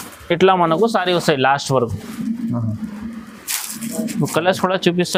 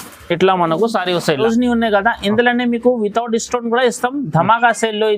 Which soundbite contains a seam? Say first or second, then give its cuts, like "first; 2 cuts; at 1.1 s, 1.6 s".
second; 1 cut; at 1.4 s